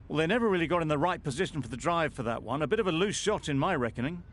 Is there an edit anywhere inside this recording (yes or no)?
no